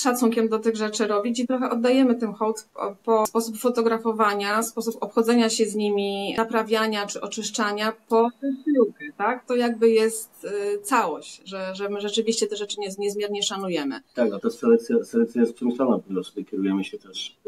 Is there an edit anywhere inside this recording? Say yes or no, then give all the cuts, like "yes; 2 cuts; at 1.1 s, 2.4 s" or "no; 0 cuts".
no; 0 cuts